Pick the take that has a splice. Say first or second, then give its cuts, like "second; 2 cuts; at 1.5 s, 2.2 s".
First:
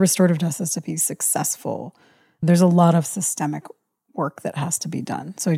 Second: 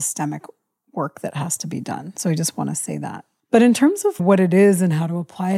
second; 1 cut; at 4.2 s